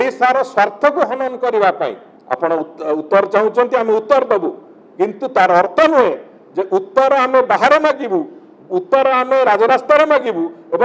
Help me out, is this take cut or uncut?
cut